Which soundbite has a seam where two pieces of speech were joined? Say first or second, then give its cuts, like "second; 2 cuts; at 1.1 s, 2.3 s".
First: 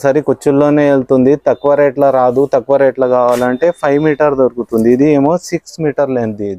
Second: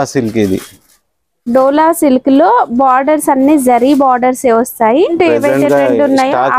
second; 1 cut; at 5.1 s